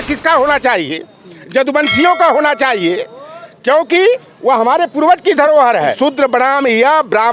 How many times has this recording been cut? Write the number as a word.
one